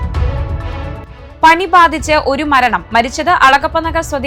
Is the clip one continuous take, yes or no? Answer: no